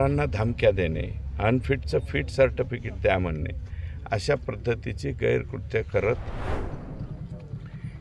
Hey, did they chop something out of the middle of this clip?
yes; 1 cut; at 6.7 s

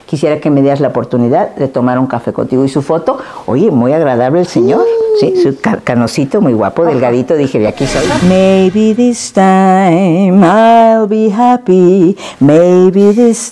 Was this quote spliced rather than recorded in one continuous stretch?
yes; 1 cut; at 8.1 s

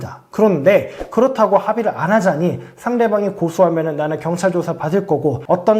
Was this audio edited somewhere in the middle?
no; 0 cuts

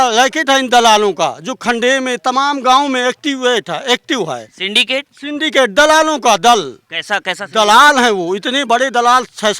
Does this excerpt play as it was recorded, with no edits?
yes; 0 cuts

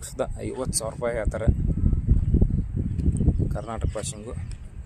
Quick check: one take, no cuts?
yes; 0 cuts

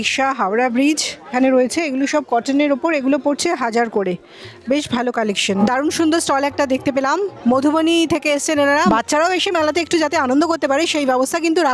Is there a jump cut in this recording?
yes; 3 cuts; at 1.3 s, 5.6 s, 8.8 s

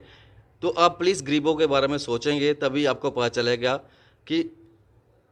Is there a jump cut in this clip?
no; 0 cuts

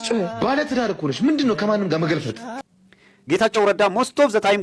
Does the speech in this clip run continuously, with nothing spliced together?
no; 1 cut; at 2.5 s

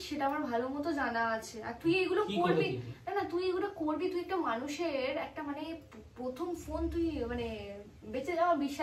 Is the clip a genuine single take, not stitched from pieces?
yes; 0 cuts

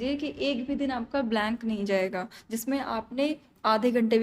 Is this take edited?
no; 0 cuts

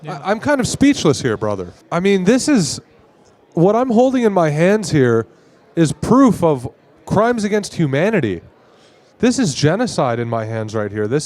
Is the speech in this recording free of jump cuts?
no; 1 cut; at 1.8 s

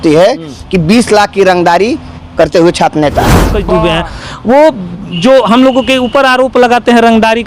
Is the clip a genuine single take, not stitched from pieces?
no; 1 cut; at 3.5 s

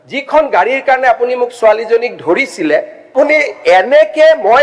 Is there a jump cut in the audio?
yes; 1 cut; at 3.1 s

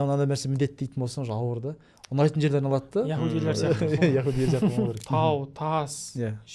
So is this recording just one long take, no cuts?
no; 1 cut; at 5.0 s

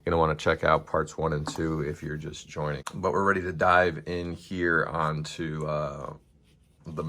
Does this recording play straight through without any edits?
no; 1 cut; at 2.9 s

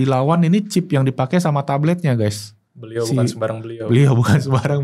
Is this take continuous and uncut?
yes; 0 cuts

